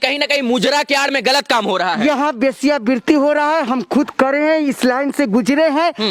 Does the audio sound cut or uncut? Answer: uncut